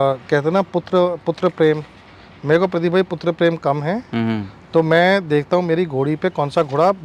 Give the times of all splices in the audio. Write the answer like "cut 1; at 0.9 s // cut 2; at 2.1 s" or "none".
none